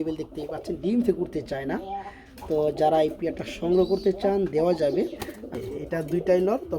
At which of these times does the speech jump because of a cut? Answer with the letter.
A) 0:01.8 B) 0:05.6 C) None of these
B